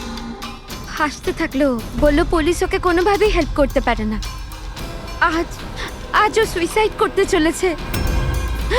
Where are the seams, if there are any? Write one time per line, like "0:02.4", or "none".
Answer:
0:00.9